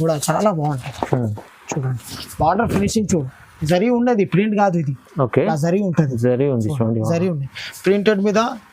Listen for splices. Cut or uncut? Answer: uncut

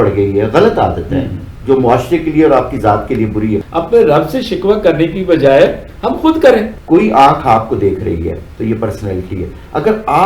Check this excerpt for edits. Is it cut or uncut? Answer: cut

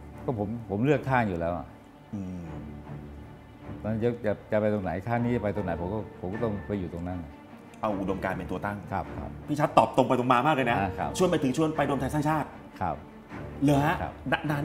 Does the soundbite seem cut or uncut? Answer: cut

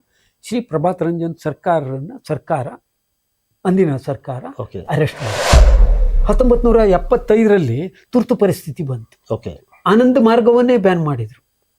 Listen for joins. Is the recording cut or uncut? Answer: uncut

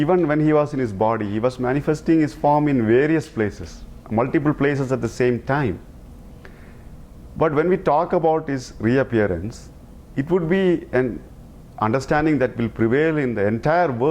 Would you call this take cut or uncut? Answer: uncut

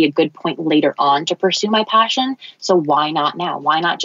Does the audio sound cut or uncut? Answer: uncut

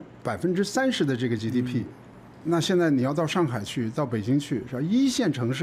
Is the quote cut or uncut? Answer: uncut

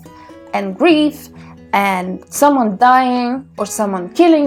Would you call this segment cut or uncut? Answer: uncut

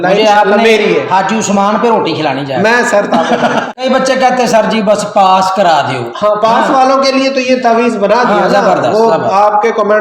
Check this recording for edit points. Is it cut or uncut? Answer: cut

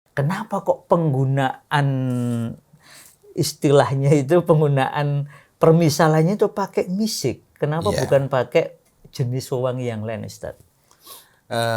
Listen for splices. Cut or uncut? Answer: uncut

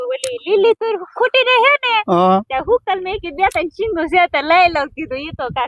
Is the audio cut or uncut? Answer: uncut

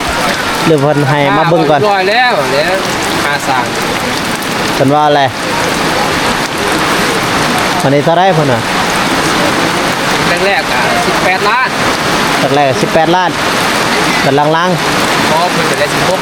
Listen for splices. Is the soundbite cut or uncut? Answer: uncut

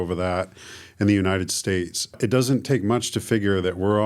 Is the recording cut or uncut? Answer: cut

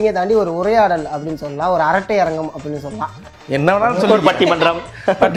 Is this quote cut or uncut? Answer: uncut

